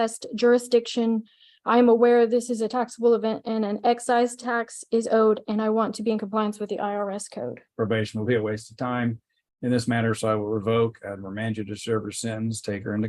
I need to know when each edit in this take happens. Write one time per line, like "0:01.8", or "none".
0:07.7